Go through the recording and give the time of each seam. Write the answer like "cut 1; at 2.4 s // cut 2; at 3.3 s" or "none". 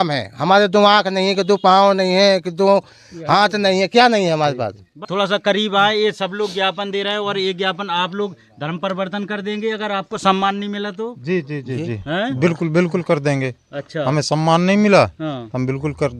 cut 1; at 5.1 s

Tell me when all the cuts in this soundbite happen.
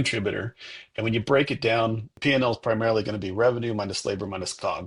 cut 1; at 2.1 s

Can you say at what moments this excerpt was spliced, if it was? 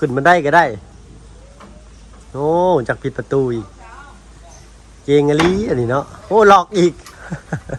none

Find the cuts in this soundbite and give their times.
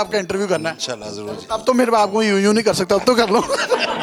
none

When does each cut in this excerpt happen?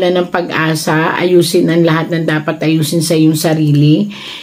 none

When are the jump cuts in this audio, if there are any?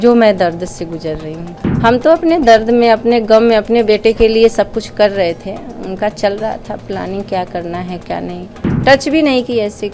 cut 1; at 1.6 s // cut 2; at 8.6 s

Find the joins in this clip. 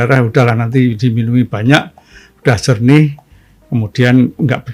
none

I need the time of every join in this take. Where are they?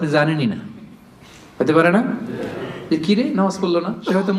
none

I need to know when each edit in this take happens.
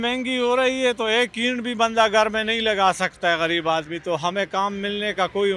none

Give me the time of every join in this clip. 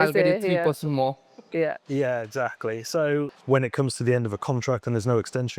cut 1; at 3.3 s

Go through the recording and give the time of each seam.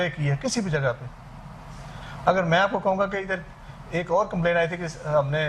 none

